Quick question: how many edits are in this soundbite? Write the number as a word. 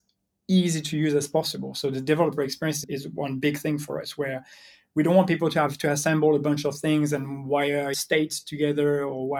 two